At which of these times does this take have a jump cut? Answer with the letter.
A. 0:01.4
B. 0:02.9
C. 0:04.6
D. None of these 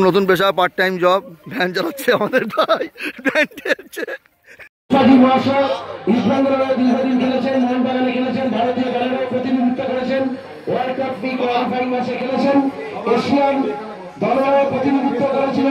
C